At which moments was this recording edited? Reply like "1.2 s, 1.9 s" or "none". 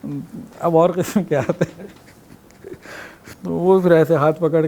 none